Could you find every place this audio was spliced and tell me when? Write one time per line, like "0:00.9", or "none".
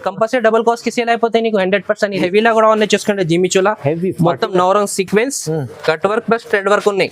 0:02.2